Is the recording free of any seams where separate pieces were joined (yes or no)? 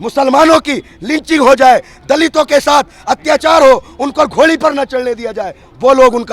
yes